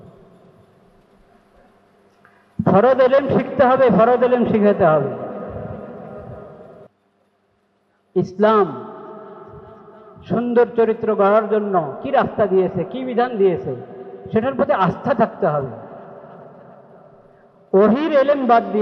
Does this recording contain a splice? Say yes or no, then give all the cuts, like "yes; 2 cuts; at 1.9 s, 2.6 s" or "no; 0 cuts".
yes; 1 cut; at 6.9 s